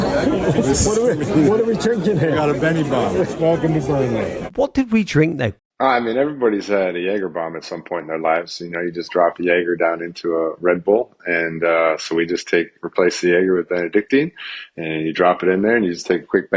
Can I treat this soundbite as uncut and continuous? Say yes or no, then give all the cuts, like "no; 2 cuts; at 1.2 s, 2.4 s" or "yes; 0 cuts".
no; 2 cuts; at 4.4 s, 5.6 s